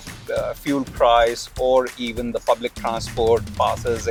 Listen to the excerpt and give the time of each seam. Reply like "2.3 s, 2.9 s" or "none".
none